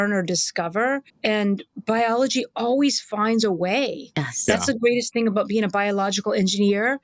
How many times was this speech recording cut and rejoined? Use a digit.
1